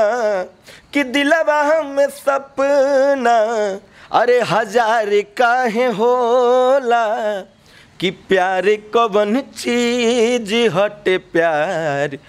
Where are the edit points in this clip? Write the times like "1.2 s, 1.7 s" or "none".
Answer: none